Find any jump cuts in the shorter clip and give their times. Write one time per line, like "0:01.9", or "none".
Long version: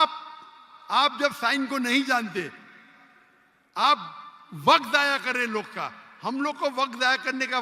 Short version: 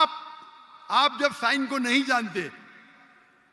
none

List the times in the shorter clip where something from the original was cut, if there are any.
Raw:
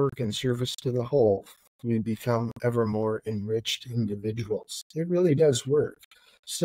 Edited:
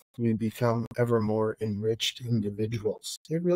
none

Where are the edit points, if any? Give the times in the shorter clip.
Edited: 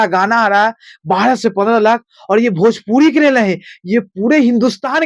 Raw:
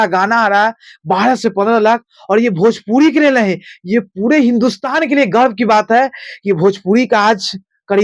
none

